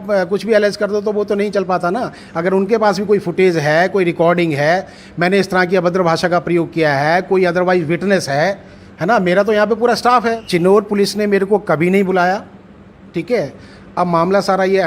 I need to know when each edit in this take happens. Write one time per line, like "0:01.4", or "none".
0:10.2